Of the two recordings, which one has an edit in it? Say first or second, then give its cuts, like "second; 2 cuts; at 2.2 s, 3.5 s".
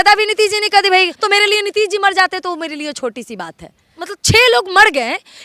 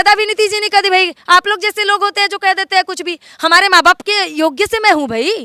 first; 2 cuts; at 1.1 s, 3.9 s